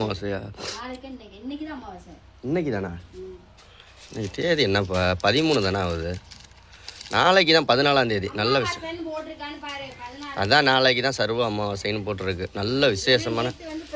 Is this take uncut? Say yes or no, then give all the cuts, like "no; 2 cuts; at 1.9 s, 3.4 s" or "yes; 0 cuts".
yes; 0 cuts